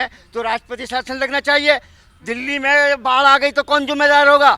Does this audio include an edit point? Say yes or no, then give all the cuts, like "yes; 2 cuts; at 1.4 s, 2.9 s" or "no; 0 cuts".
no; 0 cuts